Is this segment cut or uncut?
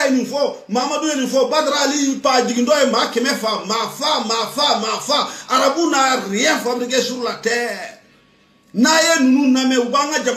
uncut